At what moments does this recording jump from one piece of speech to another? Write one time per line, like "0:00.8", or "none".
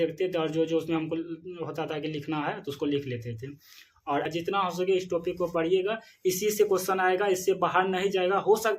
0:04.3